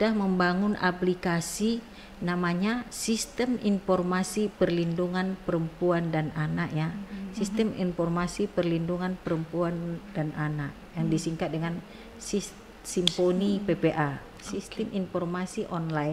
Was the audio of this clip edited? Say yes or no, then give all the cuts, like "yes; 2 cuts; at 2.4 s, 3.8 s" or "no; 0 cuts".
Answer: no; 0 cuts